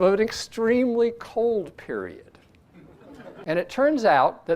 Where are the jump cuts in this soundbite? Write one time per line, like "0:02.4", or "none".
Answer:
0:03.3